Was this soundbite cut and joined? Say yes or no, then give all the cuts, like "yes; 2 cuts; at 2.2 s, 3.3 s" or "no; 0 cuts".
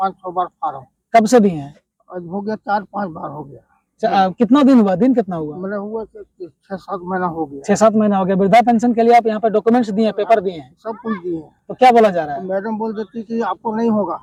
no; 0 cuts